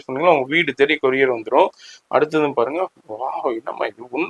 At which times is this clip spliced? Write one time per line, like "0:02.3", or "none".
none